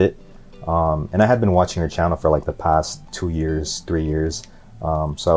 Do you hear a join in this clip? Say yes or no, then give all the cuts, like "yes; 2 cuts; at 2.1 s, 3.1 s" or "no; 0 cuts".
no; 0 cuts